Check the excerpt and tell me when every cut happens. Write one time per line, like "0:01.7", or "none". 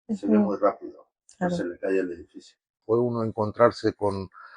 0:02.8